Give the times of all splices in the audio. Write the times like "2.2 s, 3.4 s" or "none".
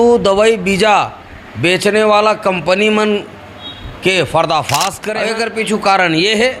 5.1 s